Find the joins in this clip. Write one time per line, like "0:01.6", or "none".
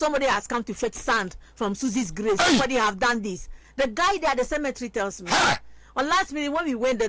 none